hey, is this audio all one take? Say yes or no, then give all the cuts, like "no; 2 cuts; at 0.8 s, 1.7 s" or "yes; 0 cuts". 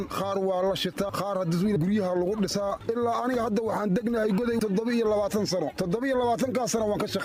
no; 2 cuts; at 1.8 s, 2.8 s